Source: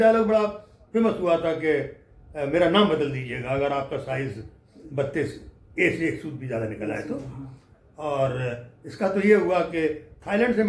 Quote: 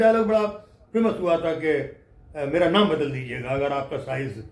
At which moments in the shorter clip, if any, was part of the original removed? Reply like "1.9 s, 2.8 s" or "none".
none